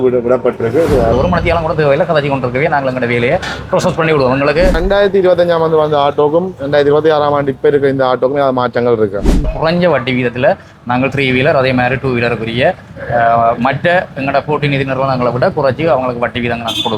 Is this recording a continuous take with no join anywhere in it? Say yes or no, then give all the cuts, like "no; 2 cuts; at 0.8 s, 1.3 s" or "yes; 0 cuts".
no; 3 cuts; at 1.1 s, 4.8 s, 9.5 s